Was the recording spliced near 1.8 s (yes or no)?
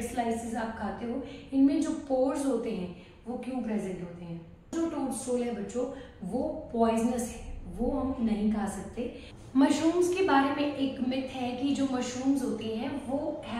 no